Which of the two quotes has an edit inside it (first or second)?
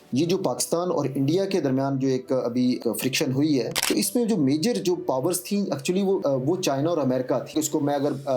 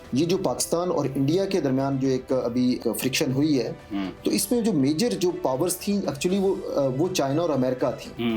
first